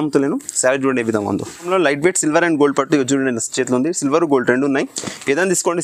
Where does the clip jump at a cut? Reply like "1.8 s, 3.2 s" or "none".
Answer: 1.7 s